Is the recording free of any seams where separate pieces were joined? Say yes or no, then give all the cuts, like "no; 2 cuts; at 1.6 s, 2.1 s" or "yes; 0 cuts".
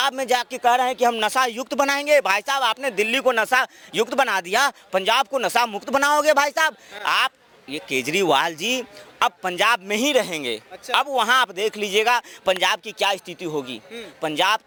yes; 0 cuts